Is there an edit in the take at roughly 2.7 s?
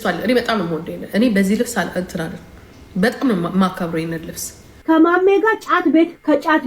no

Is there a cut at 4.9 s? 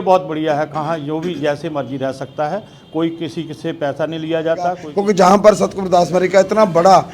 yes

